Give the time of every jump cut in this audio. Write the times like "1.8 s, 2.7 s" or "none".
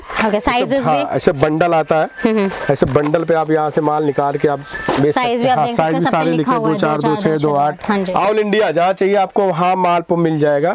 8.1 s